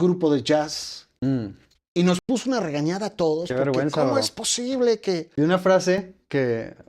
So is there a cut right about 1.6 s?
no; 1 cut; at 5.3 s

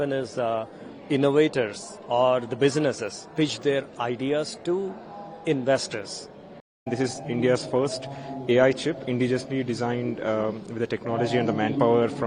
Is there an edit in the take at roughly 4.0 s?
no; 1 cut; at 6.8 s

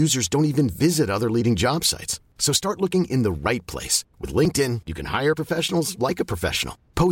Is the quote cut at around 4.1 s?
no; 0 cuts

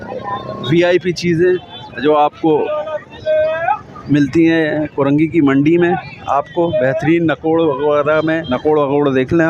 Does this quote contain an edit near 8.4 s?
yes; 1 cut; at 8.4 s

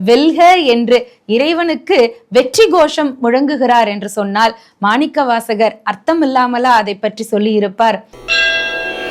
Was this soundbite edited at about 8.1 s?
yes; 1 cut; at 8.1 s

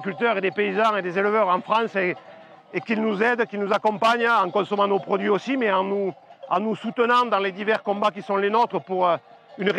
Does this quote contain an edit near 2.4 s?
no; 0 cuts

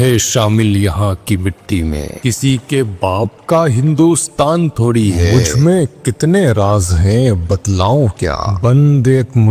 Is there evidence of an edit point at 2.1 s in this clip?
yes; 3 cuts; at 2.1 s, 5.2 s, 8.5 s

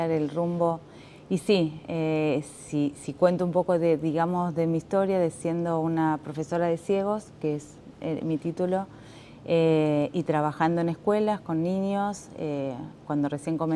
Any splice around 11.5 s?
no; 1 cut; at 2.9 s

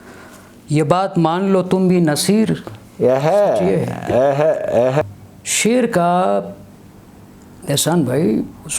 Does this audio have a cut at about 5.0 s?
yes; 1 cut; at 5.0 s

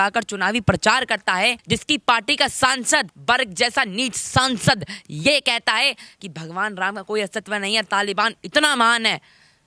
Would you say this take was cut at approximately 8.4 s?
no; 2 cuts; at 1.6 s, 3.1 s

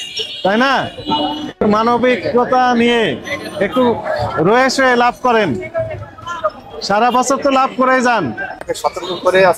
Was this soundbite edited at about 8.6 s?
yes; 1 cut; at 8.6 s

